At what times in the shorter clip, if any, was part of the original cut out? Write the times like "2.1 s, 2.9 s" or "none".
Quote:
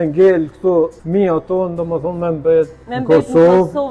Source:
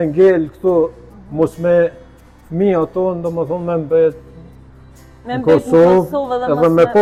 1.0 s, 2.9 s